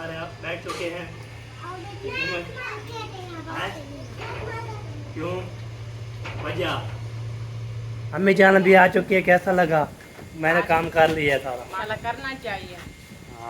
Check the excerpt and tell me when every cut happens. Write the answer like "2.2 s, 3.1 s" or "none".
2.7 s, 8.2 s, 11.8 s